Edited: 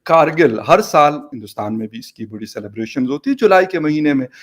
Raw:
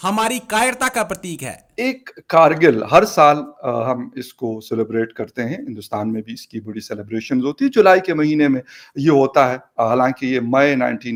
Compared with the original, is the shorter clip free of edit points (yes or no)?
no